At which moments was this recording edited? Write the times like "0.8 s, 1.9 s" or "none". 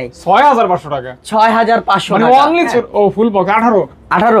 2.7 s